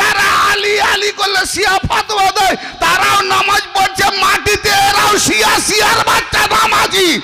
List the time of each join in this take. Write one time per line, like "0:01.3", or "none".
none